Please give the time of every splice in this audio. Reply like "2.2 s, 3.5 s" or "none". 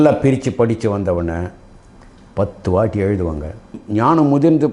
3.8 s